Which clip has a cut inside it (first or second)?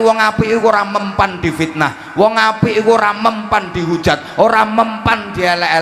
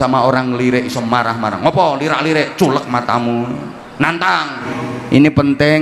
second